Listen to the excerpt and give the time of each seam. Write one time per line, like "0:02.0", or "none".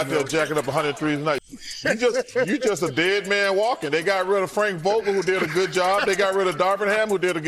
0:01.4